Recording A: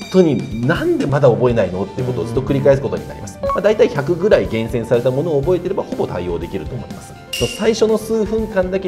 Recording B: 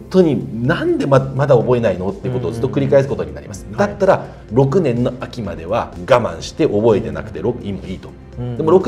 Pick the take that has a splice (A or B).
A